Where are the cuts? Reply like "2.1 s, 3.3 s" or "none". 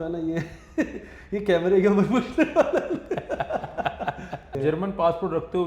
4.5 s